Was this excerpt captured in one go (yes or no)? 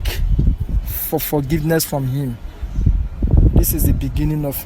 yes